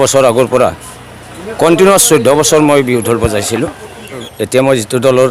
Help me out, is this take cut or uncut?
cut